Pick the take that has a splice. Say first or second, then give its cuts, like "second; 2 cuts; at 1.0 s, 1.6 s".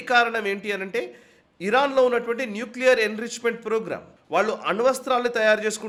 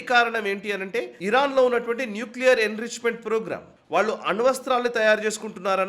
second; 1 cut; at 1.1 s